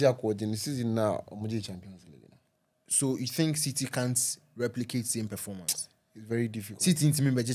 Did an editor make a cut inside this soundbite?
no; 0 cuts

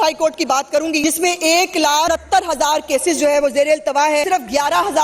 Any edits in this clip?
yes; 3 cuts; at 1.0 s, 2.1 s, 4.3 s

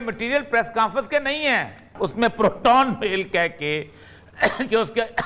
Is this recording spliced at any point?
yes; 1 cut; at 1.9 s

